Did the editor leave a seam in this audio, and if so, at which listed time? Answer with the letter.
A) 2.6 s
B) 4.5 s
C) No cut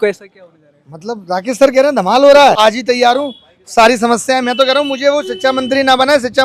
A